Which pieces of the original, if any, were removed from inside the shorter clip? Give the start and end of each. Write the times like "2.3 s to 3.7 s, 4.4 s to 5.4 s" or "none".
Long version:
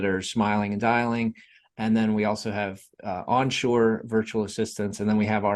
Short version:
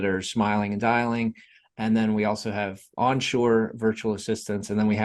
2.8 s to 3.1 s